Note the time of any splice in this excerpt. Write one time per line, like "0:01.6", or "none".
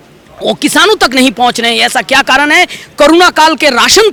none